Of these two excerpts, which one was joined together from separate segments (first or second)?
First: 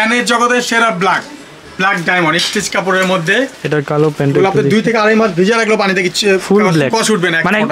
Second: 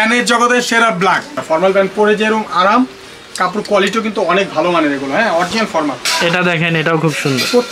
second